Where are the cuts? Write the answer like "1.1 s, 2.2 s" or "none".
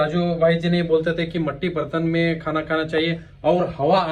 none